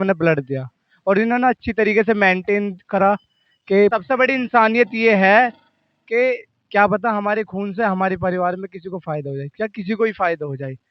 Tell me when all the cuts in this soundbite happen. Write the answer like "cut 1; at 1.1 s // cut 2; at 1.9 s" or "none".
cut 1; at 3.9 s

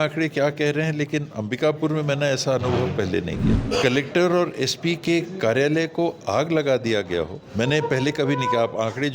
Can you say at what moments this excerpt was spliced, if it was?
cut 1; at 3.5 s // cut 2; at 7.4 s

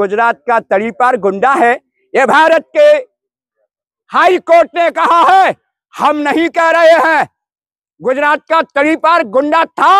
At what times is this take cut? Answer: none

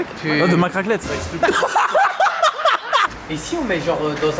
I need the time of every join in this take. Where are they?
cut 1; at 3.1 s

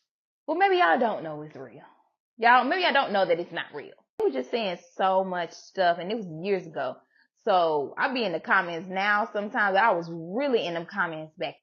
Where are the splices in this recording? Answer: cut 1; at 4.2 s

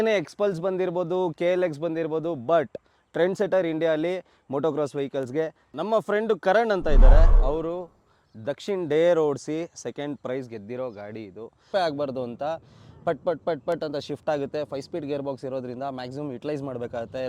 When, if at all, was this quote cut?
cut 1; at 5.6 s // cut 2; at 11.7 s

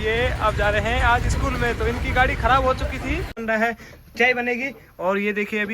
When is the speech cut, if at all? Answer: cut 1; at 3.4 s

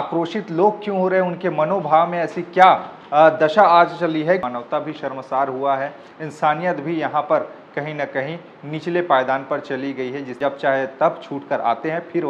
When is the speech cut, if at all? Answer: cut 1; at 4.5 s // cut 2; at 10.3 s

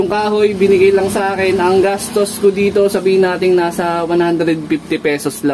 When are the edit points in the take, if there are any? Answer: none

